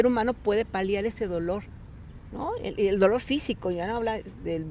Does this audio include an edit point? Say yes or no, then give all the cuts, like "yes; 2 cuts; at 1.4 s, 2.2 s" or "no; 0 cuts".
no; 0 cuts